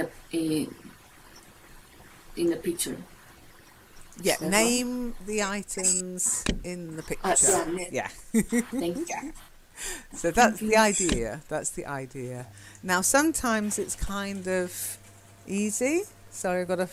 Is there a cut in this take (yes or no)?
no